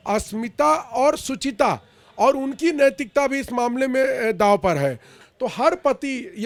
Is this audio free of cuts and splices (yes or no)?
yes